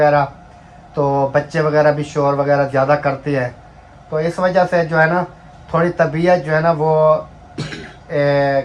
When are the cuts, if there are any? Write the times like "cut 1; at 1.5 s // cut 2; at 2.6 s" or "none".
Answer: none